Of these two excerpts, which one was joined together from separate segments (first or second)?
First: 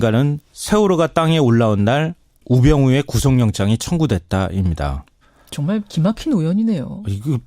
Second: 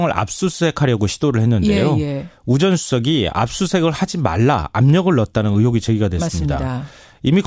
first